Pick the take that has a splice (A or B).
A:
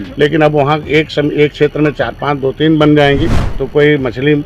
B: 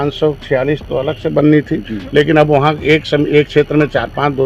A